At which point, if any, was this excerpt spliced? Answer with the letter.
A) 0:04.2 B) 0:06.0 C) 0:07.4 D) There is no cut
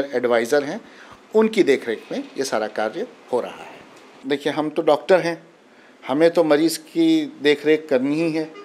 A